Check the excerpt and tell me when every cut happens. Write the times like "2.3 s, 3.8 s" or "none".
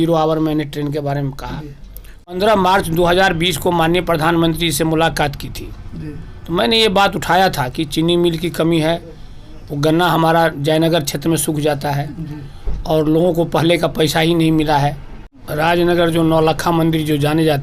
2.3 s, 15.4 s